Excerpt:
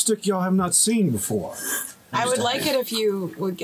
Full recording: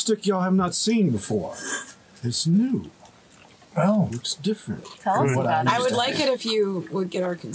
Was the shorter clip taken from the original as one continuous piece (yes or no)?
no